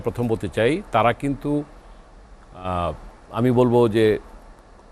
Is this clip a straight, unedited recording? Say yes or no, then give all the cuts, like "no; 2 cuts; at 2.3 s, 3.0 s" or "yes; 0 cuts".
yes; 0 cuts